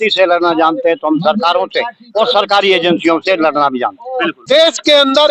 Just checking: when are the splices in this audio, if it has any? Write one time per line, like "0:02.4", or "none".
0:04.3